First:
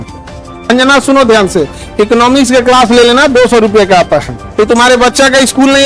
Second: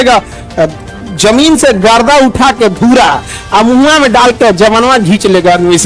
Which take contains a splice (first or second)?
first